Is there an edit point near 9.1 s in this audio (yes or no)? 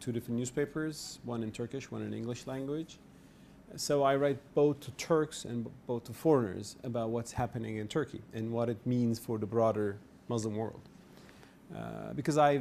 no